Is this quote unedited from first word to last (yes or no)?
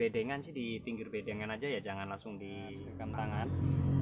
no